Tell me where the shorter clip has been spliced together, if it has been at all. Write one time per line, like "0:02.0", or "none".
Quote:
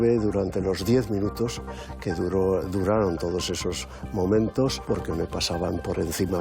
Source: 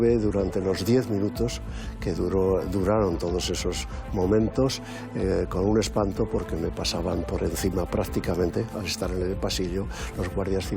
0:04.8